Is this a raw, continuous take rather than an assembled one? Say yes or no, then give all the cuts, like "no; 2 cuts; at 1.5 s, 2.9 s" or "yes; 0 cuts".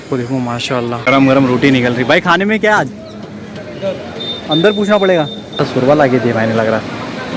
no; 2 cuts; at 1.0 s, 5.6 s